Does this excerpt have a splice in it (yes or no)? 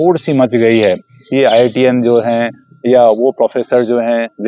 no